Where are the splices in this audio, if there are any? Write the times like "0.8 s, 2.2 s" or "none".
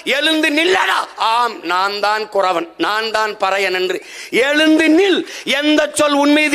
none